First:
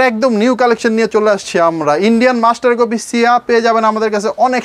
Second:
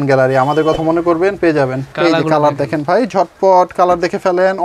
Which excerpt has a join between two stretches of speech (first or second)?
second